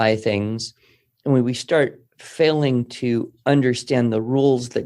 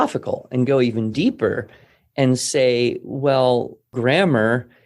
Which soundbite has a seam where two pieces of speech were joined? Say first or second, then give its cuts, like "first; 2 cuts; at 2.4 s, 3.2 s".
second; 1 cut; at 3.9 s